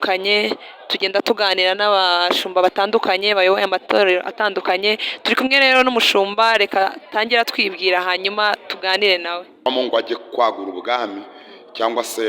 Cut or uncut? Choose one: cut